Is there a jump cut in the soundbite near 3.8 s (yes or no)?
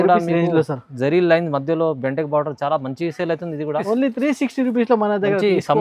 yes